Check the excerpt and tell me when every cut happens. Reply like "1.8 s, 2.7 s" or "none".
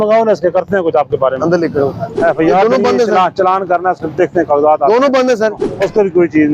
2.0 s, 5.6 s